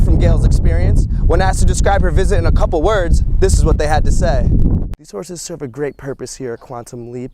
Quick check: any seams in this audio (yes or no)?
yes